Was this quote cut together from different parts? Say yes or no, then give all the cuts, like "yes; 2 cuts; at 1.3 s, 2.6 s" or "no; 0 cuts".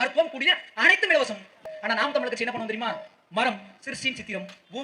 yes; 1 cut; at 1.7 s